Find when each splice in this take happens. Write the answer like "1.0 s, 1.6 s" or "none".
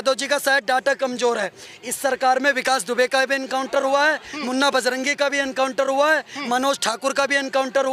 none